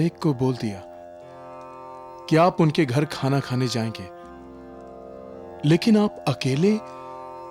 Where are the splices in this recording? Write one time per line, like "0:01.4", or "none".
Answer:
none